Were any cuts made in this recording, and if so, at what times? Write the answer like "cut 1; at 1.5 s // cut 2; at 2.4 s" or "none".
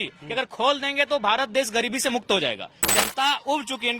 cut 1; at 2.9 s